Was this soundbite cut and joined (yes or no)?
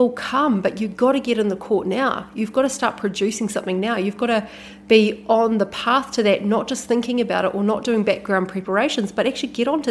no